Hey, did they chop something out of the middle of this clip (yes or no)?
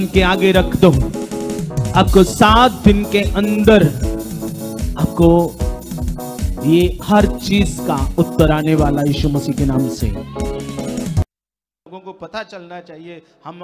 yes